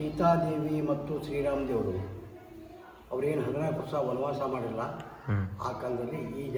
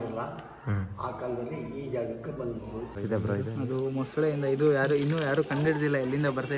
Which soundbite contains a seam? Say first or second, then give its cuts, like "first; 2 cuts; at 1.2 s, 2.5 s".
second; 1 cut; at 3.0 s